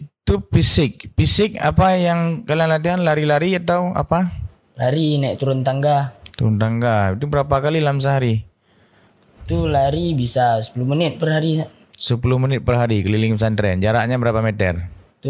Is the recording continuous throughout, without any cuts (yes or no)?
yes